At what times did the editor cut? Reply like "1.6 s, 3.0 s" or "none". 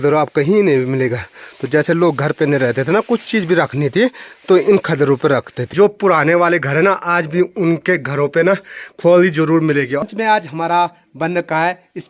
5.6 s, 10.1 s